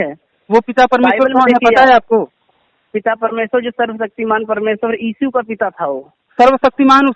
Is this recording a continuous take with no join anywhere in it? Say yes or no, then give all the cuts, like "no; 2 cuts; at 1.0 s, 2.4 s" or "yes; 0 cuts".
yes; 0 cuts